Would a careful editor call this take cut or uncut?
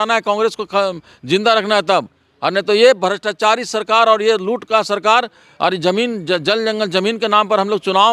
uncut